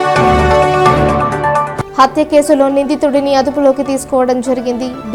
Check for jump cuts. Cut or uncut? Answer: uncut